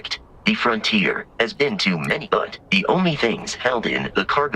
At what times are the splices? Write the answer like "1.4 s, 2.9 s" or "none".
2.2 s